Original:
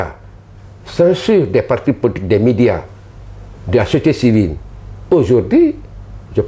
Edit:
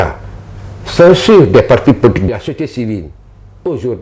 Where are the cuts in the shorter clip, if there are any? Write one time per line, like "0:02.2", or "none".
0:02.2